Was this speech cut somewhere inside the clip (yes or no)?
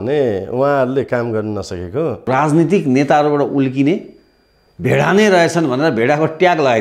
yes